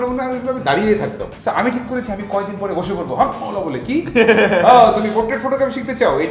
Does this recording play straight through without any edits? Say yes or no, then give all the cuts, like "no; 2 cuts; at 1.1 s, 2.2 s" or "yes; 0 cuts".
no; 1 cut; at 1.3 s